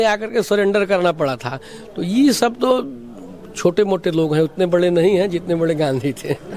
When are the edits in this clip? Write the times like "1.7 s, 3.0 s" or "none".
none